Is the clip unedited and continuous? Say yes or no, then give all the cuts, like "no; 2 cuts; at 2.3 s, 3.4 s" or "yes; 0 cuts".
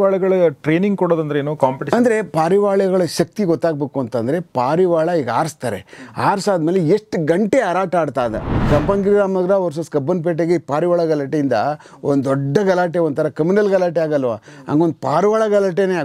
no; 1 cut; at 8.6 s